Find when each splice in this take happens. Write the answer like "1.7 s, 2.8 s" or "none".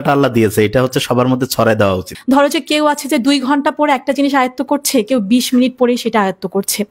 2.1 s